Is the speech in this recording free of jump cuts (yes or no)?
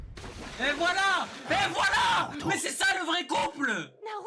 yes